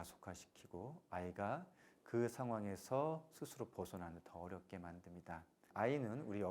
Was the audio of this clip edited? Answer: yes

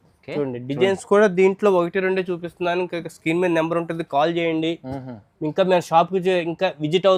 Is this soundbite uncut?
yes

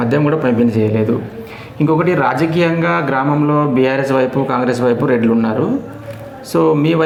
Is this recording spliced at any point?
no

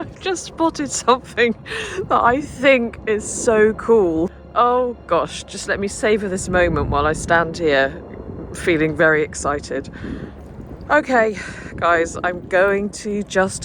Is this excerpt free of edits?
no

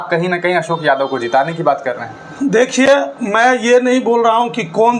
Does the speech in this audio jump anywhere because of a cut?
no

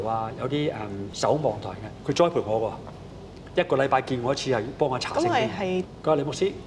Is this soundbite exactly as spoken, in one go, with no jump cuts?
no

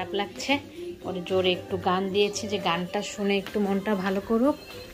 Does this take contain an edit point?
no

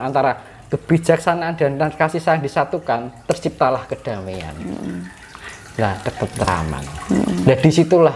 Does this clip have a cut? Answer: no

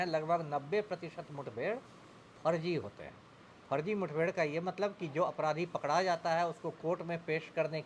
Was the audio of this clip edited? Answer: no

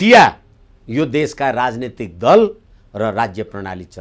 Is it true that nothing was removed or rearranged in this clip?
yes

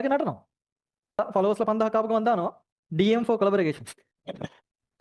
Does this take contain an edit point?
yes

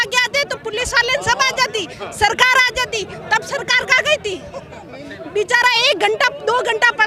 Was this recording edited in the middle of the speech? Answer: no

